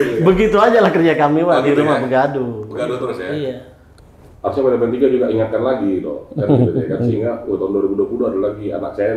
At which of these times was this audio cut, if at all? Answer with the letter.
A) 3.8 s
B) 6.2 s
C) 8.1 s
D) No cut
A